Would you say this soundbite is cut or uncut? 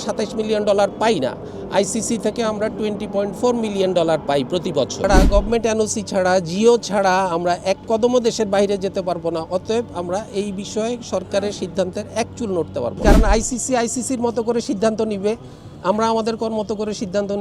cut